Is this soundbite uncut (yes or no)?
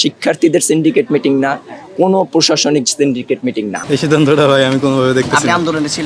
no